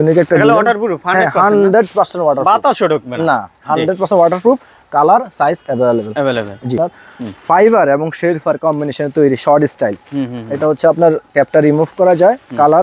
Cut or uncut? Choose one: cut